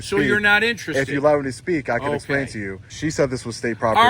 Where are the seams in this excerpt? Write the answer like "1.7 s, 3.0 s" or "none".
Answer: 2.8 s